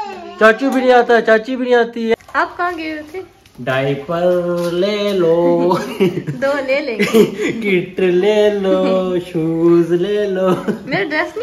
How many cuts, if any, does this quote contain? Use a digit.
1